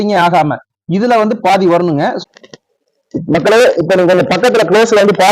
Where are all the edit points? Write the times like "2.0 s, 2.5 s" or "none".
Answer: 2.2 s